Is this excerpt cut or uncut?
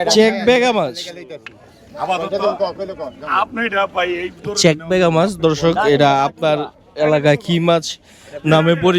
uncut